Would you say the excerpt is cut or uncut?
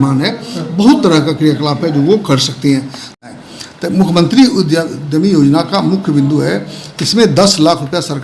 cut